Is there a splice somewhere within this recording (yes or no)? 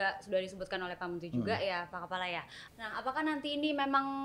yes